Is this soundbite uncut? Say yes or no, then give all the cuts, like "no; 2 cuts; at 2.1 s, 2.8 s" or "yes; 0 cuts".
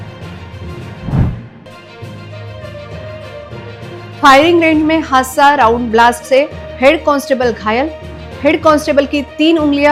yes; 0 cuts